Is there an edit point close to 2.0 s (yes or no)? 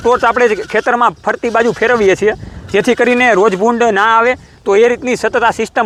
no